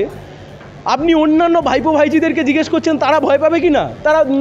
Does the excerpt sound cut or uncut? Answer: uncut